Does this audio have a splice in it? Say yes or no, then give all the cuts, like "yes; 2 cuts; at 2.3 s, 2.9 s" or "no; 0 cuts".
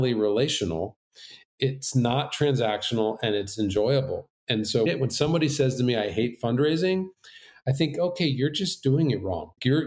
yes; 2 cuts; at 1.4 s, 4.9 s